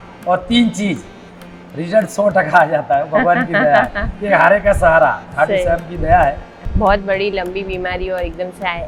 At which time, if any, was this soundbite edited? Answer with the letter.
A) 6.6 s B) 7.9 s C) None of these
A